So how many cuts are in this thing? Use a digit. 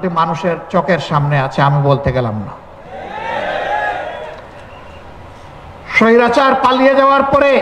0